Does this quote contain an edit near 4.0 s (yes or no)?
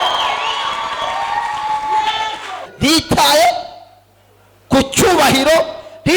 no